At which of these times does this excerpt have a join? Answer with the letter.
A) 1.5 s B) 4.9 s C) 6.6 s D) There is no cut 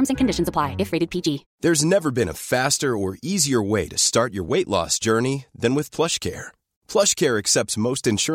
A